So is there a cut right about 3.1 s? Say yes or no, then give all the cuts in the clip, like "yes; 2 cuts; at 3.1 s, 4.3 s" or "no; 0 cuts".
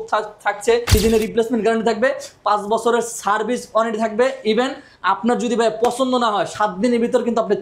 no; 1 cut; at 0.9 s